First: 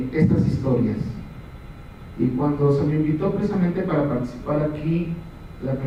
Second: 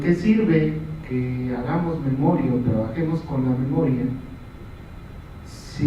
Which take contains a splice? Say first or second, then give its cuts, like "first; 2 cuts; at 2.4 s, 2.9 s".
second; 1 cut; at 3.3 s